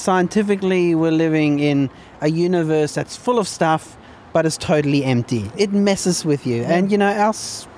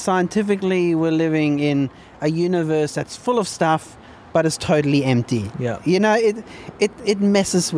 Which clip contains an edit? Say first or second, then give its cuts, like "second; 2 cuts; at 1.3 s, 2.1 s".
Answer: first; 1 cut; at 5.5 s